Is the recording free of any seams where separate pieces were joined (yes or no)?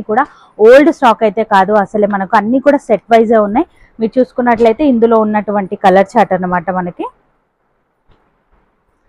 yes